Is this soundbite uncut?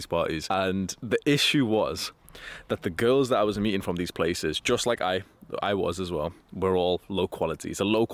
yes; 0 cuts

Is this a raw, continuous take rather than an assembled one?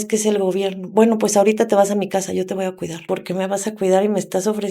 no; 1 cut; at 3.0 s

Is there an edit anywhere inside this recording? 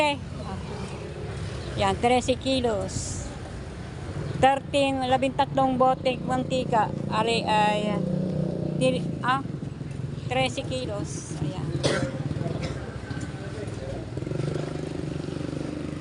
no; 0 cuts

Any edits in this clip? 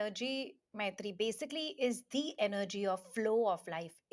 no; 0 cuts

